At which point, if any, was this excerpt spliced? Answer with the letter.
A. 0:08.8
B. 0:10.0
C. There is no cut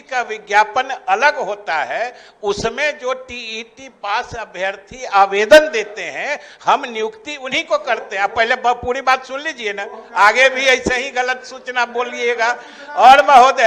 C